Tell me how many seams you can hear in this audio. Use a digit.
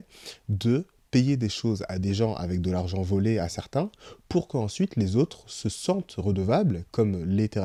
0